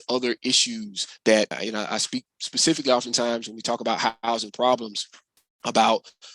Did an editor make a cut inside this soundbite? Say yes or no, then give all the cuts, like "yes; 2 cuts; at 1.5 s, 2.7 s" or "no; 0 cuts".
yes; 1 cut; at 1.6 s